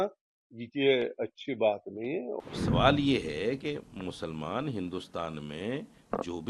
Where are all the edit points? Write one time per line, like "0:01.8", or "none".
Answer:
0:02.4